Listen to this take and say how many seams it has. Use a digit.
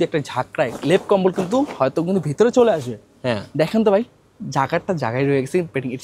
0